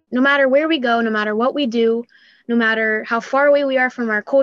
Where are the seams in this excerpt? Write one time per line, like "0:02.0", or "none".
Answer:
none